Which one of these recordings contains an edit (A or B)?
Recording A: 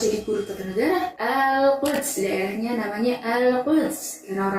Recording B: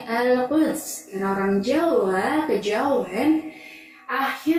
A